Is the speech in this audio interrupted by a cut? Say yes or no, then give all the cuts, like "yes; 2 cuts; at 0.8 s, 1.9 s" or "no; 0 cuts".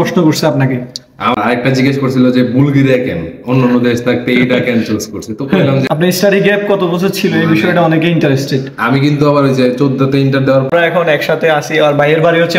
yes; 3 cuts; at 1.3 s, 5.8 s, 10.7 s